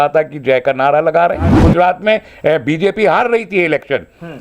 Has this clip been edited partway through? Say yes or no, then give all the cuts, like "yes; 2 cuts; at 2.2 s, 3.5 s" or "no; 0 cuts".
yes; 1 cut; at 1.5 s